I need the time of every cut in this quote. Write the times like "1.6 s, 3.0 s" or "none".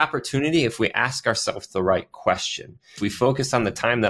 3.0 s